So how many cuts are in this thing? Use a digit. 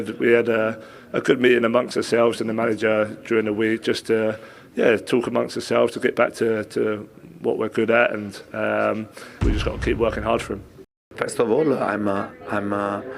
0